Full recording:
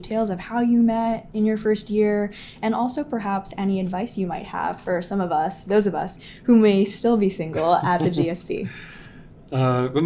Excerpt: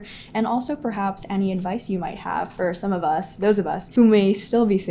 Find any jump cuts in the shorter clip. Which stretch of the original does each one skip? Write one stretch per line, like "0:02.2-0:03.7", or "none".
0:06.1-0:06.3